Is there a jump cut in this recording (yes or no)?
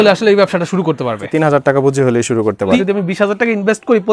yes